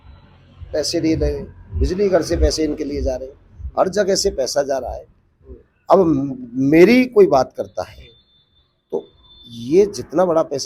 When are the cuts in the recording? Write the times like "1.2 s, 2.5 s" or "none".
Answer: none

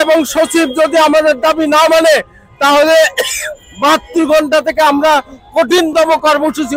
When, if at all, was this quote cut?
none

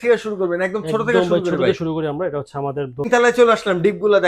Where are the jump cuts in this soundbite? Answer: 3.0 s

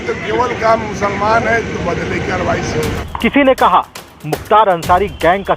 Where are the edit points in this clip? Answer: 3.0 s

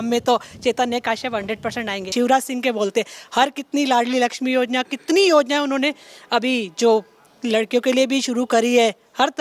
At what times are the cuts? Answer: 2.1 s

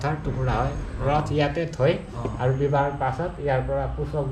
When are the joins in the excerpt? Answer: none

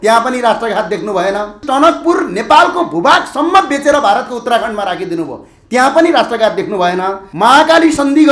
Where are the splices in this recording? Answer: 1.6 s, 7.2 s

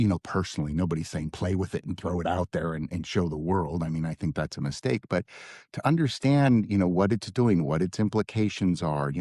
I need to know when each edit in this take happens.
none

